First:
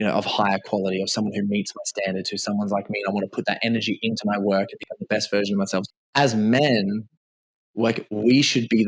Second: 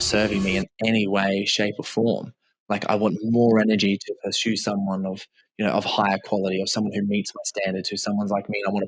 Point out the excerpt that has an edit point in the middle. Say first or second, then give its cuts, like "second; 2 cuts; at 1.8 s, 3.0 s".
first; 1 cut; at 5.9 s